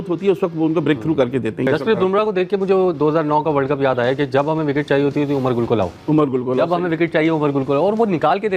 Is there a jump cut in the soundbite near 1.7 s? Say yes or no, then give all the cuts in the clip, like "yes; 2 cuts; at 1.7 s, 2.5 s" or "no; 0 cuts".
yes; 1 cut; at 1.7 s